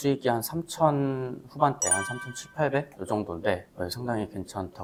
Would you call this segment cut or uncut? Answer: uncut